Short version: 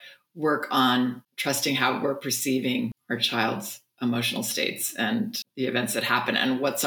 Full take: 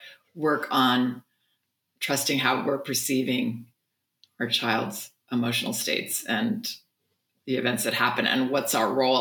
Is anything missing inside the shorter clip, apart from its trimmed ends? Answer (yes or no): yes